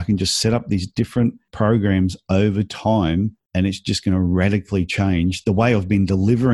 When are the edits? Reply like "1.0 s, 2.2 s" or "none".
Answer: 1.4 s, 3.4 s